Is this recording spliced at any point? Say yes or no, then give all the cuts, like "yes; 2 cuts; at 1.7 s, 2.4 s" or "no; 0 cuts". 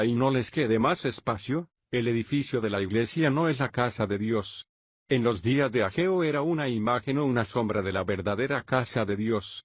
yes; 1 cut; at 1.1 s